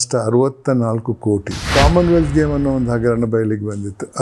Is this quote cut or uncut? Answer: cut